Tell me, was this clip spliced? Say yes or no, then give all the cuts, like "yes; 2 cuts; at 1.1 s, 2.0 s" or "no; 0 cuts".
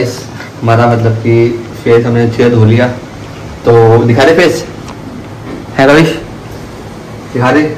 no; 0 cuts